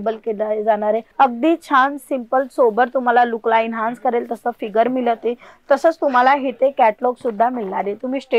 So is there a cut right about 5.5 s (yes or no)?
no